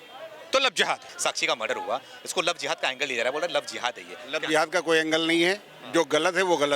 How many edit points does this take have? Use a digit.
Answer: 1